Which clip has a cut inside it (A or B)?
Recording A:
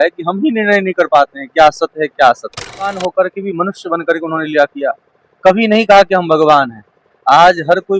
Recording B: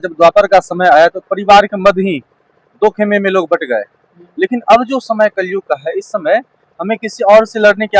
A